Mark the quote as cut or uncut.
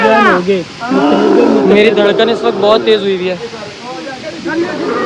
uncut